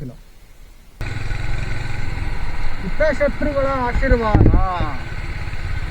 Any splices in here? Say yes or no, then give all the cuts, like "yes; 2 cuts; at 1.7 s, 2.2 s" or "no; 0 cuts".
yes; 1 cut; at 0.9 s